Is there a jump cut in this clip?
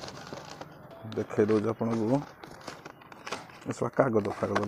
yes; 1 cut; at 0.9 s

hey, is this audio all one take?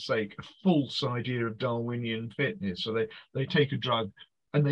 yes; 0 cuts

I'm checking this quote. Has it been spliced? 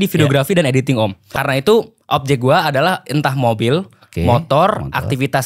yes; 1 cut; at 1.4 s

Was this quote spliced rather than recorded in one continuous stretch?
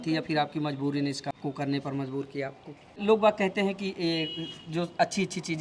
yes; 2 cuts; at 1.3 s, 3.0 s

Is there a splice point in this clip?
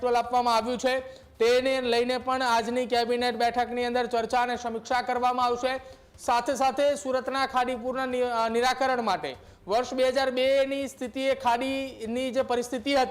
no; 0 cuts

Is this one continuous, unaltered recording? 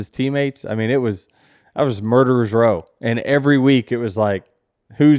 yes; 0 cuts

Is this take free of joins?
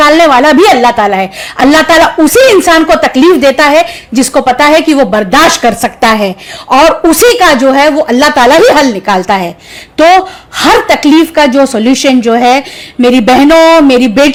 yes; 0 cuts

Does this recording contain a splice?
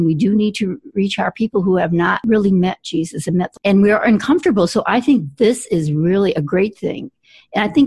yes; 2 cuts; at 2.2 s, 3.5 s

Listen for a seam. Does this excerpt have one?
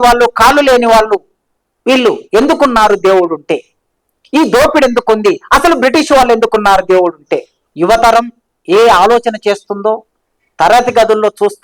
yes; 1 cut; at 7.7 s

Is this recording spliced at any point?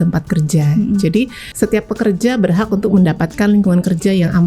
yes; 1 cut; at 1.4 s

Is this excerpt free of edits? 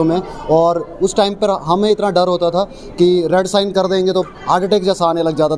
yes; 0 cuts

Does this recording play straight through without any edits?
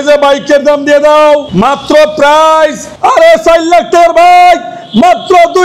no; 1 cut; at 2.9 s

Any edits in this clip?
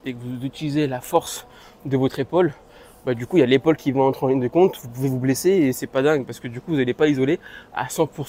no; 0 cuts

